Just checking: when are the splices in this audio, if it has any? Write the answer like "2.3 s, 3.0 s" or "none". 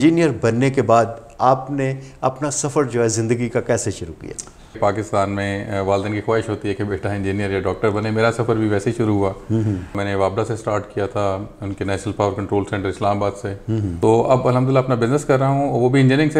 4.8 s, 10.0 s, 14.0 s

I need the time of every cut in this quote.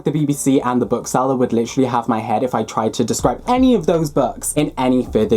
none

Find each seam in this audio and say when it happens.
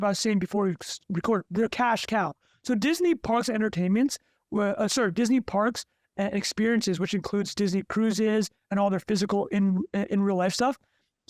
none

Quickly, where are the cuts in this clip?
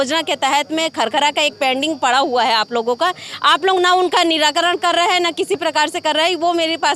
none

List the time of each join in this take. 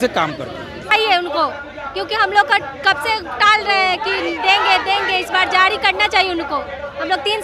1.0 s

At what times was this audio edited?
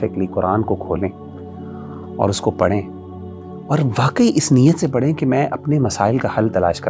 none

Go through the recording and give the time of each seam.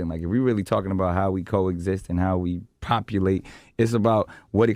3.1 s

